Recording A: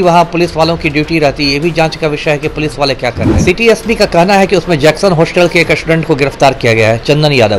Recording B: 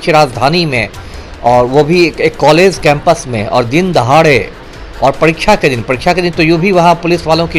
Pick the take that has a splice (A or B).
A